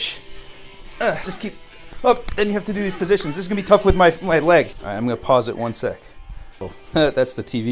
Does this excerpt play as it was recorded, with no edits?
no; 3 cuts; at 1.3 s, 4.8 s, 6.8 s

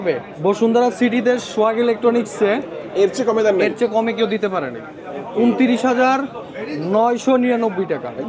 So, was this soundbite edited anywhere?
no; 0 cuts

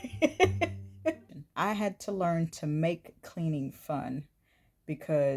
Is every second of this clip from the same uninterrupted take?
no; 1 cut; at 1.3 s

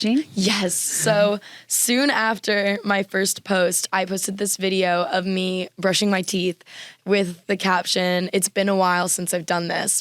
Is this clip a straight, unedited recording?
yes; 0 cuts

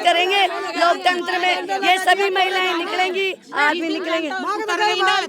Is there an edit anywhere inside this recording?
no; 0 cuts

